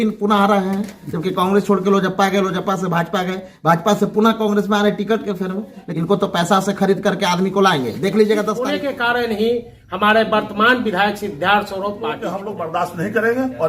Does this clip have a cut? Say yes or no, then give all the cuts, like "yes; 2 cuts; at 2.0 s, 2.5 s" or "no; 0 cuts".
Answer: yes; 3 cuts; at 5.8 s, 8.7 s, 12.4 s